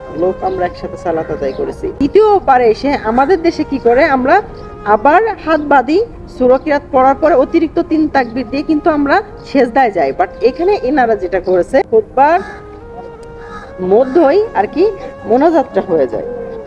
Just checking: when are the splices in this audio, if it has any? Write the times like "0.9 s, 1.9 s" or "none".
1.8 s, 11.9 s